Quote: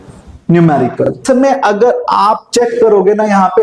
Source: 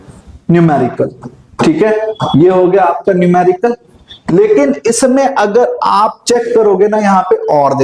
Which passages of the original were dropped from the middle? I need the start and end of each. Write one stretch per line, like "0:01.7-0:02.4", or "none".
0:01.2-0:05.0